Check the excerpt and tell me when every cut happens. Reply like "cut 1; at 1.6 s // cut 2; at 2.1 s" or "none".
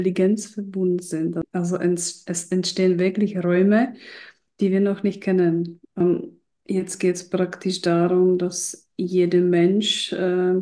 cut 1; at 1.4 s // cut 2; at 6.0 s